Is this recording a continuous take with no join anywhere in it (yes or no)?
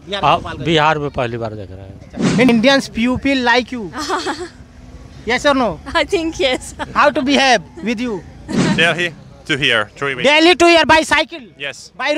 no